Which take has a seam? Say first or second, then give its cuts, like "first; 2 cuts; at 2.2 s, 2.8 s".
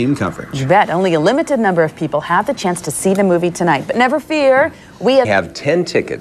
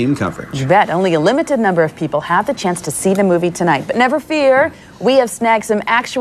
second; 1 cut; at 5.3 s